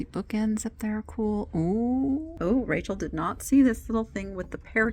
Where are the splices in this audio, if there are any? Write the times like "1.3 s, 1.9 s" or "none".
2.4 s